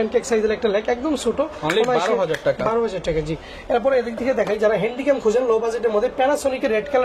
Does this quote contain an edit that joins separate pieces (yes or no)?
no